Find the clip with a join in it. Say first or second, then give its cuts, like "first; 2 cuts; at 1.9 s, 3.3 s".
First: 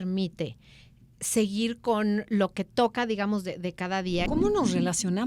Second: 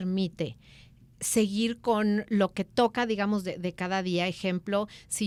first; 1 cut; at 4.3 s